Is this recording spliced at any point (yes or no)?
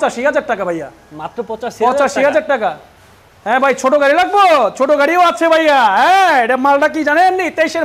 no